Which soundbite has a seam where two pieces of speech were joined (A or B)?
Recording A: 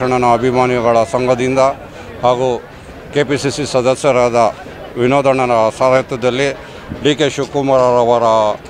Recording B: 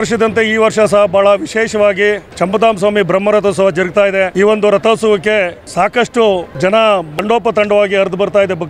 B